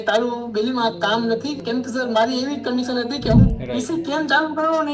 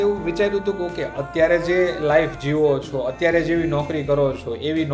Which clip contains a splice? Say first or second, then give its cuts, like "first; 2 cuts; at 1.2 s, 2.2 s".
first; 2 cuts; at 1.6 s, 3.5 s